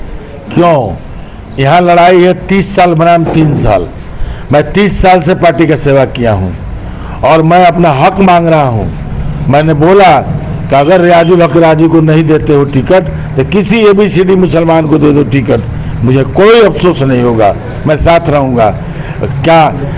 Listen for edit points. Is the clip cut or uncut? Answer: uncut